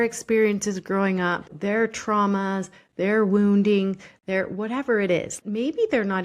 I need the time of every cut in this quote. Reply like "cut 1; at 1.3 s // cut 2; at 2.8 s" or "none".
cut 1; at 1.5 s // cut 2; at 5.3 s